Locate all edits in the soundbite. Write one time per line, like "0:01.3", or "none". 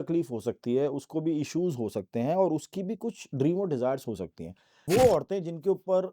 0:04.8

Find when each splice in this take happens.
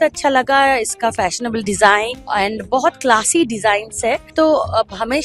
0:02.2
0:04.3

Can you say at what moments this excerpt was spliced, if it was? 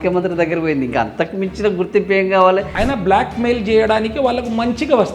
0:02.7

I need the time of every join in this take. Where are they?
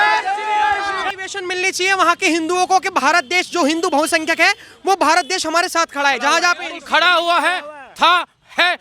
0:01.0

